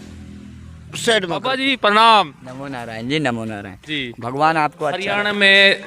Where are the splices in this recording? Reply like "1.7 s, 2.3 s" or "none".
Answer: 1.6 s, 4.9 s